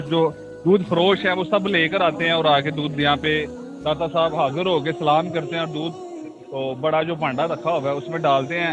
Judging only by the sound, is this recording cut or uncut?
uncut